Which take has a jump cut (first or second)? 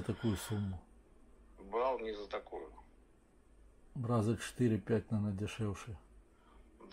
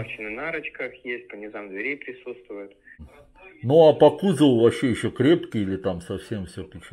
second